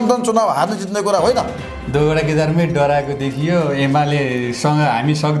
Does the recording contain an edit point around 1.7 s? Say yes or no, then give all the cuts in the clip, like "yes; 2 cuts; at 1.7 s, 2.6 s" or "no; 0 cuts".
yes; 1 cut; at 1.7 s